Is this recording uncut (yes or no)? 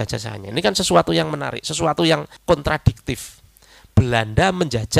no